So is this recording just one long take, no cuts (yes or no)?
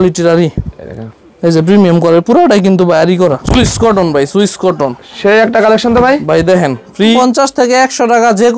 no